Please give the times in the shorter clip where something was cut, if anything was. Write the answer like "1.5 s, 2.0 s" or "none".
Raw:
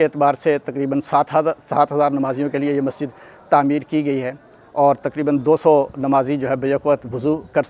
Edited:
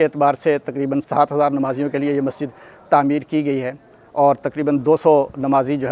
1.0 s